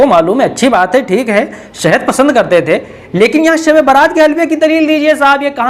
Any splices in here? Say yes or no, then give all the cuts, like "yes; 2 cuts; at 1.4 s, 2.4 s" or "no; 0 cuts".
no; 0 cuts